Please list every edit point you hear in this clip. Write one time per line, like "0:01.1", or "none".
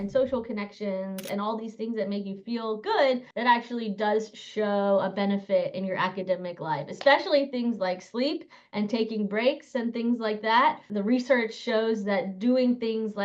0:03.3
0:10.9